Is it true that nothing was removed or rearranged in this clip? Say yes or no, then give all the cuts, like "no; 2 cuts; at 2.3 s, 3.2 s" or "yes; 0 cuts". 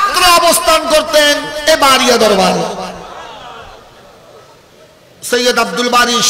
no; 1 cut; at 4.7 s